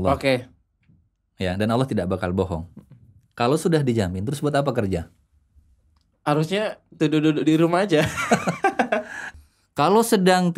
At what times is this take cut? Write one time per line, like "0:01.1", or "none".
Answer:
0:09.2